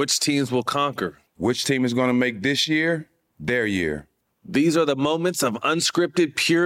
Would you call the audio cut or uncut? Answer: uncut